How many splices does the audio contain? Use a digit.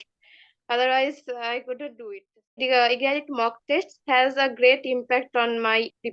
1